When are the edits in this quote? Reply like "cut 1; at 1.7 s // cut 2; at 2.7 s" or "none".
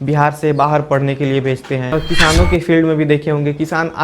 cut 1; at 2.0 s